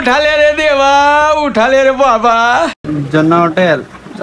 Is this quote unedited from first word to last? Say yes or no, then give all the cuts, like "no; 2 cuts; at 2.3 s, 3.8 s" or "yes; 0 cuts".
no; 1 cut; at 2.8 s